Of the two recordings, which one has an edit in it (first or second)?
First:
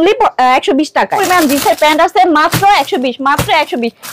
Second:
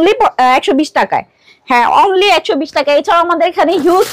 first